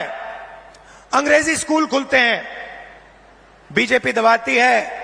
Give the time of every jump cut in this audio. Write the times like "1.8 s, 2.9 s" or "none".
none

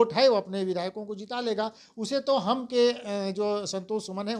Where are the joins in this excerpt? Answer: none

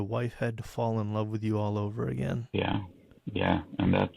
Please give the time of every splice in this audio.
2.4 s

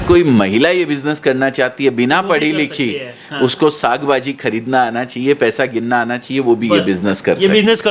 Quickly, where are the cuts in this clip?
none

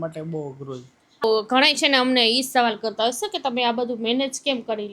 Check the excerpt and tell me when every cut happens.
1.2 s

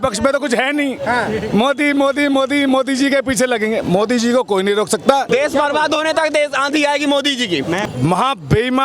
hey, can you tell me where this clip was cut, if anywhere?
5.3 s, 7.8 s

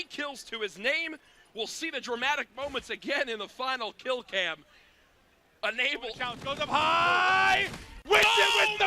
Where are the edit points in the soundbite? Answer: 6.3 s

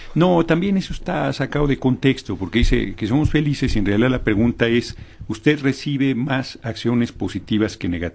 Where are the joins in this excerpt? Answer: 6.1 s

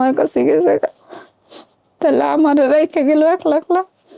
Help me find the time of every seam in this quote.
none

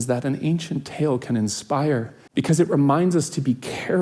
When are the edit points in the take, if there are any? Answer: 2.2 s

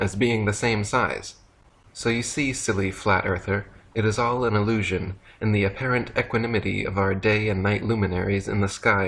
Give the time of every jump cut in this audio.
5.2 s

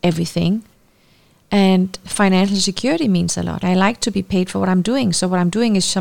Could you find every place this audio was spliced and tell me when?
2.0 s, 3.6 s

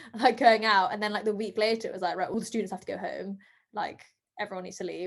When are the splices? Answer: 2.3 s

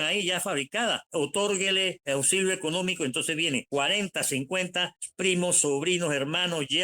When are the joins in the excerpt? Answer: 1.0 s, 2.0 s, 3.6 s, 5.0 s

